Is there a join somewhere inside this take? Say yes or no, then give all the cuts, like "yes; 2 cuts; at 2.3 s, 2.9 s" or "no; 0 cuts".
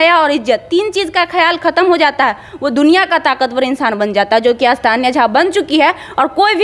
no; 0 cuts